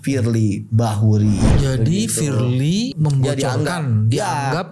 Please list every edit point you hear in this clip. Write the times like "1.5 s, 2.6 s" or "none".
1.5 s, 2.9 s

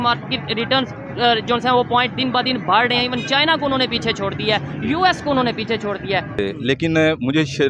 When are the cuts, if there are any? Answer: 6.3 s

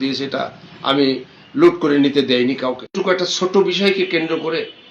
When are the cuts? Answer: 2.9 s

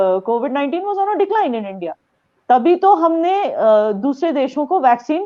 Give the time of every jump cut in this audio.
none

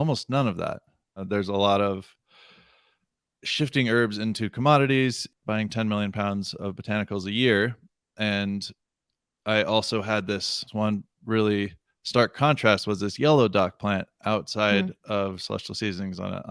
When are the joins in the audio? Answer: 1.2 s, 5.2 s, 10.7 s

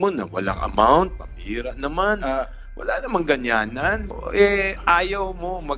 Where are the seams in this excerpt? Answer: 4.1 s

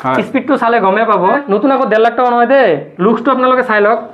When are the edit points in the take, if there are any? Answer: 1.4 s, 2.9 s

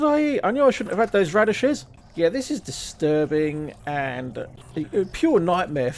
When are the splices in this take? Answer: 2.0 s, 4.5 s

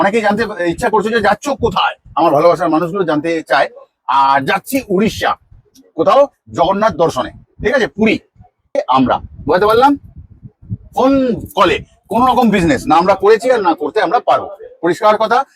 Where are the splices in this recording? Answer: 8.7 s

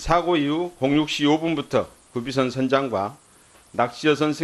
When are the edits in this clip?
1.6 s

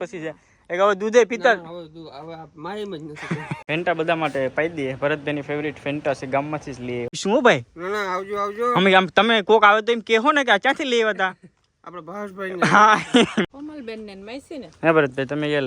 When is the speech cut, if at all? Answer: 3.5 s, 7.2 s, 13.5 s

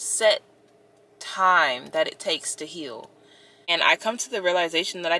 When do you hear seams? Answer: 3.0 s

